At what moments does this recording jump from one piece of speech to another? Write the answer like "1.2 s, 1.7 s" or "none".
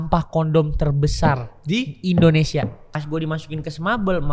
2.8 s